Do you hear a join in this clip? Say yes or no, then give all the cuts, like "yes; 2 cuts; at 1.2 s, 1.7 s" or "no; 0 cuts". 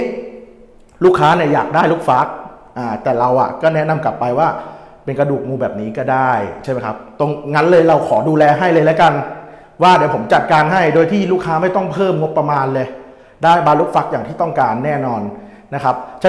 no; 0 cuts